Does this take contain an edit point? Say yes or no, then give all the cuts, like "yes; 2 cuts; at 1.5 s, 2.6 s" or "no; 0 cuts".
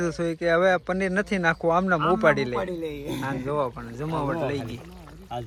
no; 0 cuts